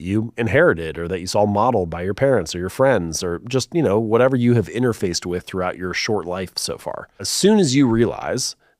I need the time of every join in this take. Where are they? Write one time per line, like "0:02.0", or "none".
0:07.3